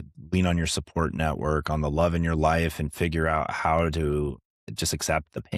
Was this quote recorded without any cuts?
no; 1 cut; at 4.6 s

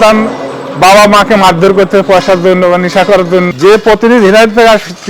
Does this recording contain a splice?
no; 0 cuts

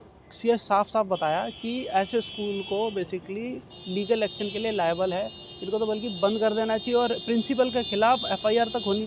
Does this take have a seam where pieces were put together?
no; 0 cuts

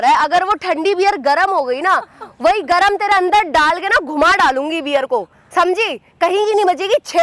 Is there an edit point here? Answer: no; 0 cuts

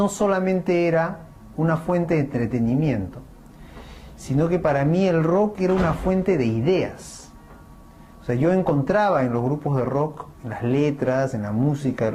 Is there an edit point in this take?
no; 0 cuts

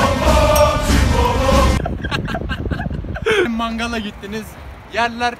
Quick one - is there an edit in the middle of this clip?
yes; 1 cut; at 3.5 s

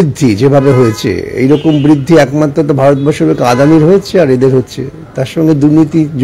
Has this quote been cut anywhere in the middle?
no; 0 cuts

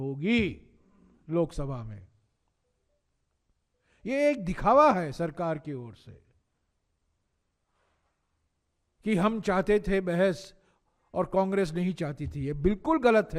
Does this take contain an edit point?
no; 0 cuts

